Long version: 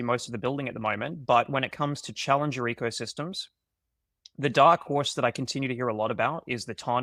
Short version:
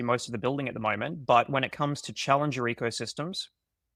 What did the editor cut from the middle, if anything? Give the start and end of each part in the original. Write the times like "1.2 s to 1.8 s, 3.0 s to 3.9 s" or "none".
none